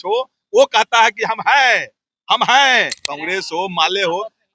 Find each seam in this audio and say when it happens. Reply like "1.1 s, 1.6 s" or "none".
3.0 s